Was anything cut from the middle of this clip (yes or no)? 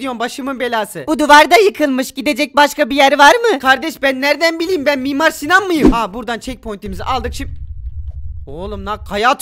yes